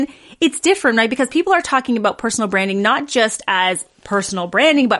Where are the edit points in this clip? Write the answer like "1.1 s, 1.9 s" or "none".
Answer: none